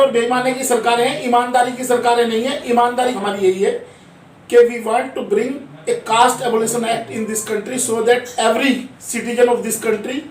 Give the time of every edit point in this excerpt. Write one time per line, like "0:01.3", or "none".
0:03.2